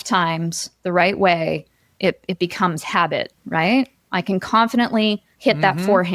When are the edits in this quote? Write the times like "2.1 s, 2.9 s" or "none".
3.4 s, 5.3 s